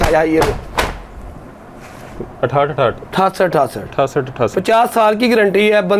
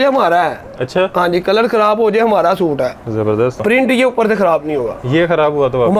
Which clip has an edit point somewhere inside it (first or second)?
second